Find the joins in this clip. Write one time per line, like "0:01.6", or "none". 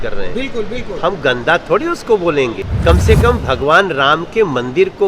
0:02.7

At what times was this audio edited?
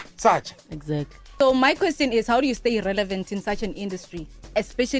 0:01.2

